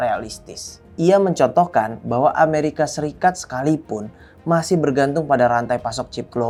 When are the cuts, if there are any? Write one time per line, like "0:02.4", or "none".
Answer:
none